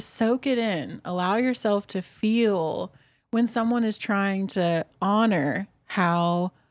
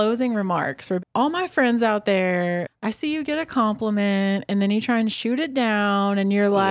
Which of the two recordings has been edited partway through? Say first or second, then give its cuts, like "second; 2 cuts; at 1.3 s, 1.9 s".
second; 2 cuts; at 1.0 s, 2.7 s